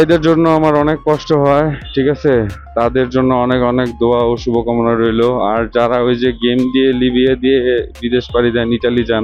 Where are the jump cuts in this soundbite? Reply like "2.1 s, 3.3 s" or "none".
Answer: none